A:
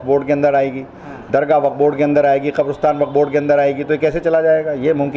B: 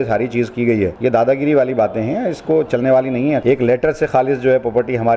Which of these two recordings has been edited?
B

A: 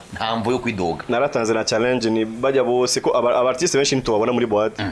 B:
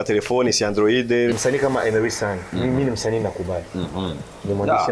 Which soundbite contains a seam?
B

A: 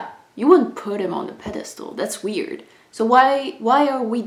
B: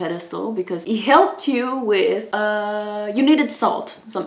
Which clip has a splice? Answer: B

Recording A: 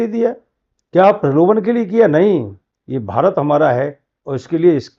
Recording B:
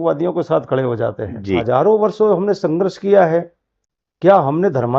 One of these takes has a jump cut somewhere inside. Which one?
B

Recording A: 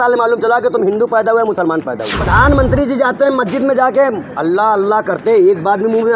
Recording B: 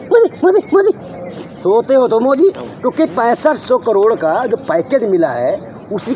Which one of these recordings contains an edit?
A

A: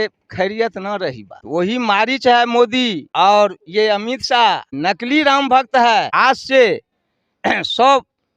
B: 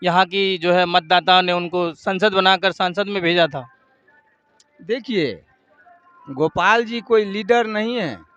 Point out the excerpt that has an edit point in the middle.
A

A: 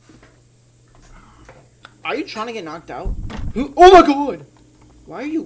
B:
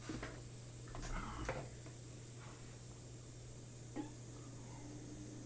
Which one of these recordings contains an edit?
A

